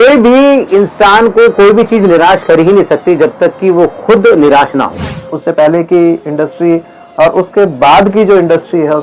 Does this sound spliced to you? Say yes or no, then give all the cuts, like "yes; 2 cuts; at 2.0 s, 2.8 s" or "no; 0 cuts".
yes; 1 cut; at 5.3 s